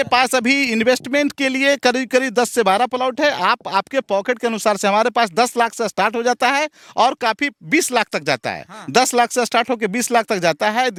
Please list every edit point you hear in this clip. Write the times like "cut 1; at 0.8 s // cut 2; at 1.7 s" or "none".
none